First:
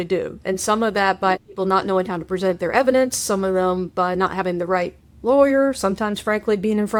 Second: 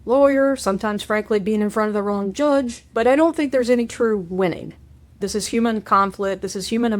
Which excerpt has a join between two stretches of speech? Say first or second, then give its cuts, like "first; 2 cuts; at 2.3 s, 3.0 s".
second; 2 cuts; at 2.8 s, 5.2 s